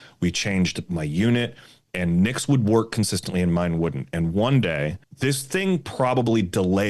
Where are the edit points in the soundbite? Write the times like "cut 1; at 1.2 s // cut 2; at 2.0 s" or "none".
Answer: cut 1; at 5.0 s

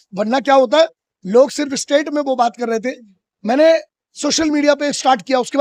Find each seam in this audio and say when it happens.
none

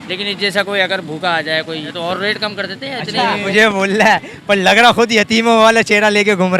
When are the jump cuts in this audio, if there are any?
cut 1; at 1.9 s // cut 2; at 3.5 s

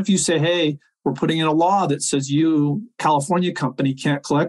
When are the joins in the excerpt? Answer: none

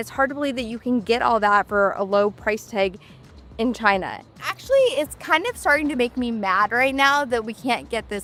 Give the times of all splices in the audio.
none

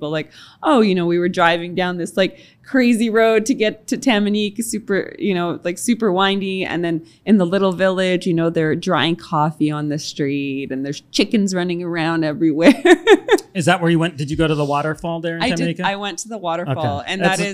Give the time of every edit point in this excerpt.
none

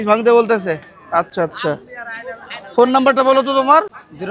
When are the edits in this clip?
none

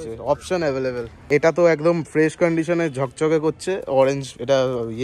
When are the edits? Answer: cut 1; at 1.2 s

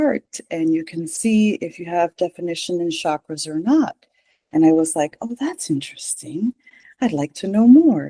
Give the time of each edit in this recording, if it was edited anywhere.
none

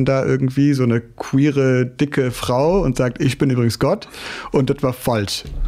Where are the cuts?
none

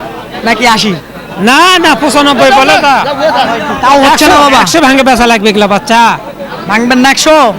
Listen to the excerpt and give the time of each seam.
none

